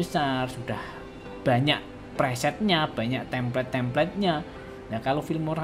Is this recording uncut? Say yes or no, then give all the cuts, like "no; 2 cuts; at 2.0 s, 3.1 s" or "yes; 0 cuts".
yes; 0 cuts